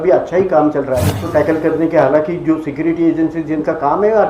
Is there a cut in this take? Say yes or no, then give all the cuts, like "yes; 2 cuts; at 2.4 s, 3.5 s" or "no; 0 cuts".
yes; 1 cut; at 1.2 s